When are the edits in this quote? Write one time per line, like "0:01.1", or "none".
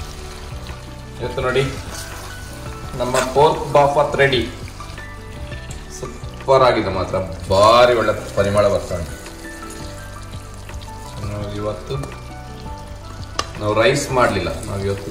none